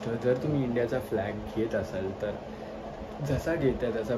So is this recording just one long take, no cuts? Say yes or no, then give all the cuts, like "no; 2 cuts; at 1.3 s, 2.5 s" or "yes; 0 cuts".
yes; 0 cuts